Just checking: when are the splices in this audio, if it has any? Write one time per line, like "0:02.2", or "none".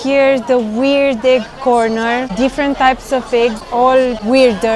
0:02.3
0:03.8